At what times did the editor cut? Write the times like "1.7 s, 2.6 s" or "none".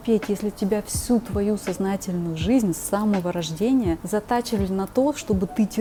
none